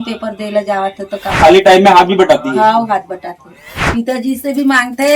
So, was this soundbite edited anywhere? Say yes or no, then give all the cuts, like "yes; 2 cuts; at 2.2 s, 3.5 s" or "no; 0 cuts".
yes; 2 cuts; at 1.4 s, 3.7 s